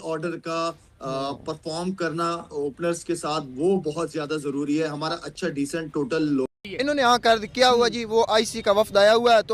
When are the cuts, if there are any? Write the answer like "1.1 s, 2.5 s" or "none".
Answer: 6.6 s